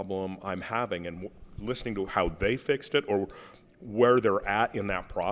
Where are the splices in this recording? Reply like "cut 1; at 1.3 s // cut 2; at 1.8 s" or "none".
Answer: none